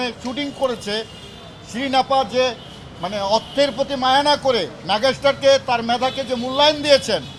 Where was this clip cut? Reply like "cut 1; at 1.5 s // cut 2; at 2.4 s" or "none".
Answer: none